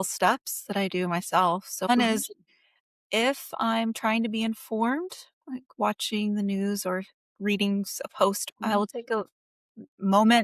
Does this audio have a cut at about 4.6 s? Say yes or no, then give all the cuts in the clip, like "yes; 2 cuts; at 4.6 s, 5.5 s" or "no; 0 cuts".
no; 2 cuts; at 1.9 s, 8.4 s